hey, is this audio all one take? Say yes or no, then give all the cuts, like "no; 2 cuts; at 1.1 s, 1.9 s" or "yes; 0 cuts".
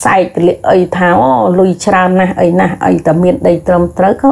yes; 0 cuts